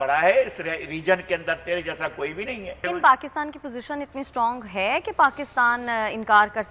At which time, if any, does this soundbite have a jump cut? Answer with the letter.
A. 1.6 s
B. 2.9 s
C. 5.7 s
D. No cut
B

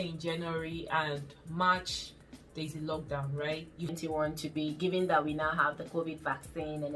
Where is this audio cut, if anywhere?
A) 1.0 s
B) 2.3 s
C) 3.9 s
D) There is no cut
C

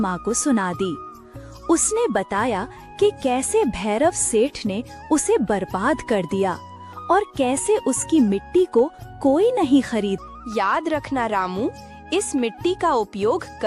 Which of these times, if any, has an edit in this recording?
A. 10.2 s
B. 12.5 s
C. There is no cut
A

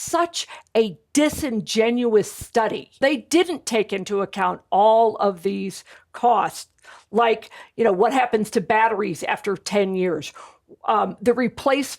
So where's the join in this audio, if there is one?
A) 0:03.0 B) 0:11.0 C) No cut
A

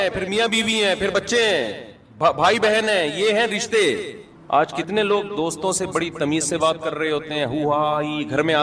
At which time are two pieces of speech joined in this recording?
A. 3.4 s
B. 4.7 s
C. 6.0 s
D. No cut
D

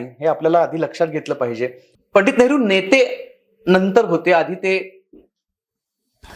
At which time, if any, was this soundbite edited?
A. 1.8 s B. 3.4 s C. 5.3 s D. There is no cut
A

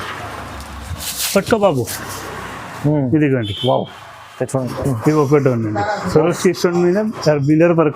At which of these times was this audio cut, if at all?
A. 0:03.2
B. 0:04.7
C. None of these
B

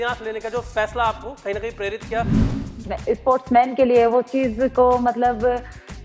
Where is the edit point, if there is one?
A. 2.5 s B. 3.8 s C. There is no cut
A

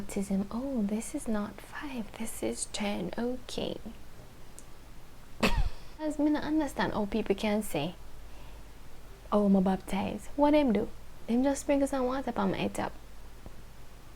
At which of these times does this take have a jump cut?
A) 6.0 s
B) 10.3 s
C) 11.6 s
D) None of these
A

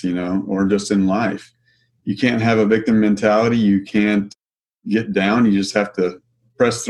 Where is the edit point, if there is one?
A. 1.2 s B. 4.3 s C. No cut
B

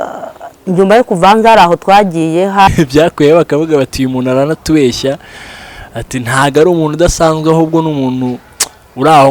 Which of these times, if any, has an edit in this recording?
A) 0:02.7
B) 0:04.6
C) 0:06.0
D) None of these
A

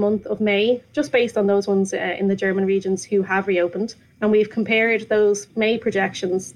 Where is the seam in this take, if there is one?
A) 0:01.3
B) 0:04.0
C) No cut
B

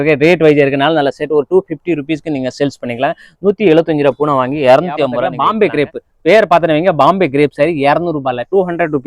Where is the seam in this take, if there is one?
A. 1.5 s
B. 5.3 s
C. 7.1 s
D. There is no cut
B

